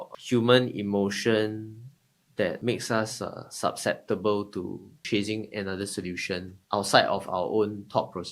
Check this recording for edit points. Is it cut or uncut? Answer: cut